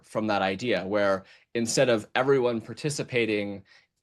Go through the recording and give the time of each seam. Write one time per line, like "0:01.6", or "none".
none